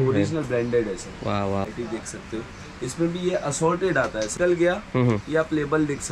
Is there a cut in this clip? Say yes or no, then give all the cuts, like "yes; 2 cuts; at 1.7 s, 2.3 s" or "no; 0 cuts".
yes; 2 cuts; at 1.6 s, 4.3 s